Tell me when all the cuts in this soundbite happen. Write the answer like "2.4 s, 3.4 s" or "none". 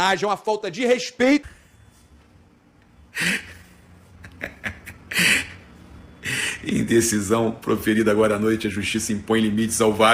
1.4 s